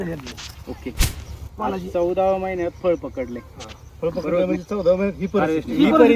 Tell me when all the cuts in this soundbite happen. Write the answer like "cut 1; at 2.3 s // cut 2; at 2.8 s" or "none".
none

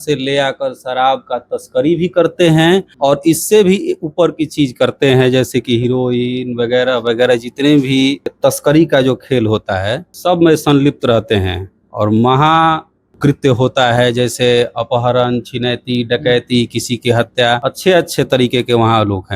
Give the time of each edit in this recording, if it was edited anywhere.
cut 1; at 2.9 s // cut 2; at 8.3 s // cut 3; at 10.1 s // cut 4; at 17.6 s

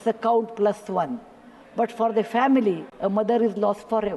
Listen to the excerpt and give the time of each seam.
cut 1; at 2.9 s

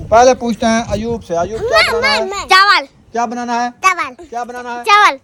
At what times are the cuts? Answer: none

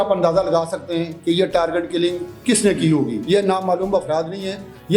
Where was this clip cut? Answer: cut 1; at 3.2 s

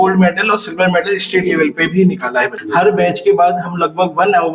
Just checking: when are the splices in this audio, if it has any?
cut 1; at 2.6 s

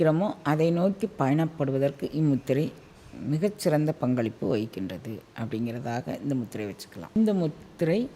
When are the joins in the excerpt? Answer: cut 1; at 7.2 s

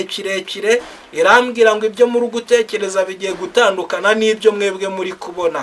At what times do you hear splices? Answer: none

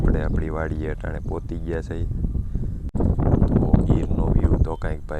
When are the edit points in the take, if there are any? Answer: cut 1; at 2.9 s

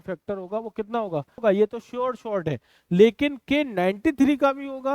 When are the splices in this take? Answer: cut 1; at 1.4 s

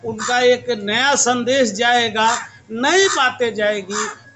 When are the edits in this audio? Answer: none

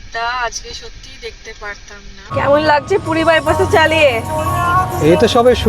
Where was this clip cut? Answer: cut 1; at 2.3 s

